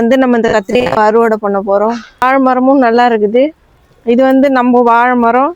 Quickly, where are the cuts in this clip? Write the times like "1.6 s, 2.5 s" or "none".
2.2 s